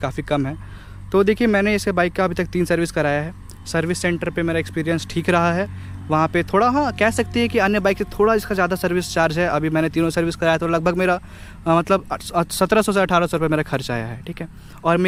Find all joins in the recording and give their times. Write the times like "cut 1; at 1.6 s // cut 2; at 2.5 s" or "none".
none